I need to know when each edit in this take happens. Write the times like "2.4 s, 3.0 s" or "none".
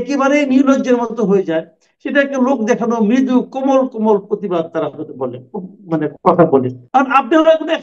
6.8 s